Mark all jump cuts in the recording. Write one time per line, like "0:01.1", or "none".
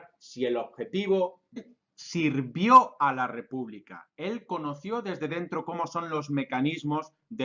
none